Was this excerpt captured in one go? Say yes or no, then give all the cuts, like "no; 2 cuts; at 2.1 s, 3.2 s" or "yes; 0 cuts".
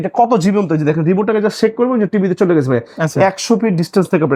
yes; 0 cuts